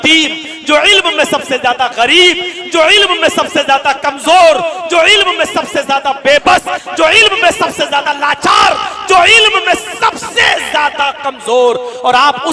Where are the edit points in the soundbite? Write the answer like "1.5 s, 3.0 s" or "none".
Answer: none